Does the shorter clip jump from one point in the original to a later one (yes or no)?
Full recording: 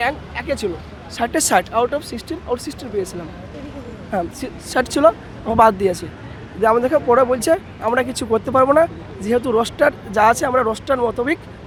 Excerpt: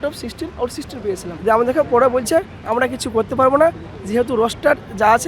yes